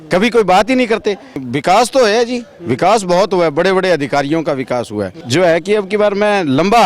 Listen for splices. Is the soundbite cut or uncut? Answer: cut